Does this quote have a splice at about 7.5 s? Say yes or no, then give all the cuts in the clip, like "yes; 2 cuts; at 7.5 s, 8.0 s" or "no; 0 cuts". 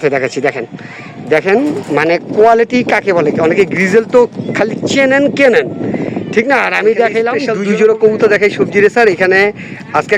yes; 1 cut; at 7.5 s